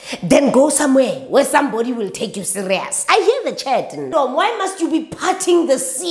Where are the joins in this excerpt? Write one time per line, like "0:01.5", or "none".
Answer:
0:04.1